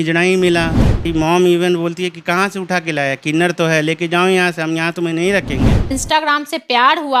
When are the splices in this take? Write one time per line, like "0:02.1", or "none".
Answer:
0:01.1
0:05.9